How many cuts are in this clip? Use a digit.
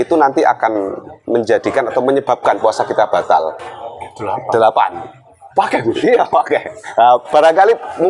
0